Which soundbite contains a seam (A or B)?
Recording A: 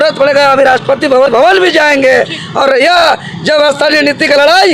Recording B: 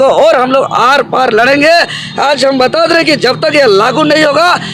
A